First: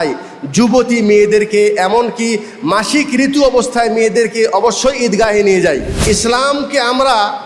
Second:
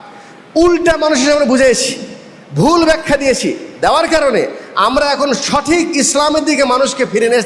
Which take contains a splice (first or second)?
first